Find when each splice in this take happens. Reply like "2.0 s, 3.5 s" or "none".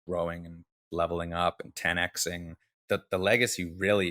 2.7 s